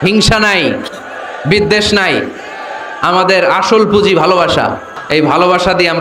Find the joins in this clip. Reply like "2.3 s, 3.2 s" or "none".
4.9 s